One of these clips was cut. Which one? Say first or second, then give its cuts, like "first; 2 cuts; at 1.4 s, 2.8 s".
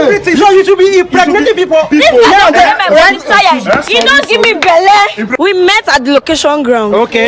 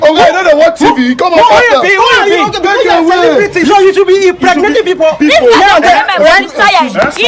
first; 1 cut; at 5.3 s